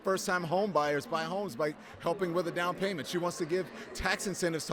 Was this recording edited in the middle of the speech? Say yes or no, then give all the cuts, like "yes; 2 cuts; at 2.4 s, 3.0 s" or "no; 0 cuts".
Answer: no; 0 cuts